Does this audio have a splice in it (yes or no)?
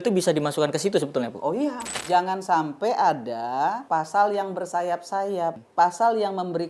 yes